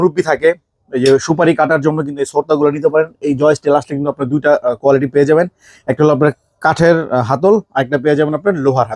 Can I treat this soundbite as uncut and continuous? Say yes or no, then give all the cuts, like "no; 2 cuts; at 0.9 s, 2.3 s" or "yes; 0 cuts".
yes; 0 cuts